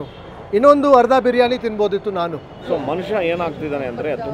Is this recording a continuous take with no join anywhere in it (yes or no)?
no